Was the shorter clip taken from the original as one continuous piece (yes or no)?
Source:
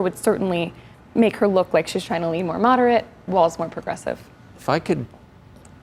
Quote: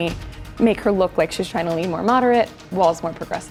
yes